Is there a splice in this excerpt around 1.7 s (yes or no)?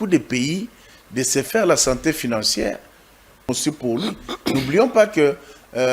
no